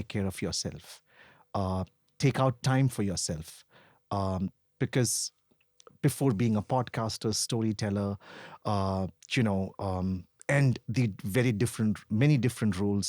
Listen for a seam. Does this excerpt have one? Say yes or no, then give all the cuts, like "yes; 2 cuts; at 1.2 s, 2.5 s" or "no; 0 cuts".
no; 0 cuts